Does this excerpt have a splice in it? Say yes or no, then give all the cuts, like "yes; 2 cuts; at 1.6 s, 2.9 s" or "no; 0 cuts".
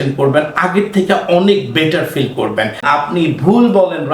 yes; 1 cut; at 2.8 s